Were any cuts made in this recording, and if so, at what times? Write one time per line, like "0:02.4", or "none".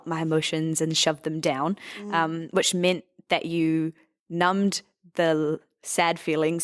none